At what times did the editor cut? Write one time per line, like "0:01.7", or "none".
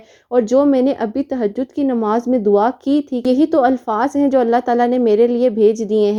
none